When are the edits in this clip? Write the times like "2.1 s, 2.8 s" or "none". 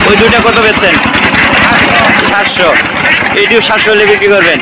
none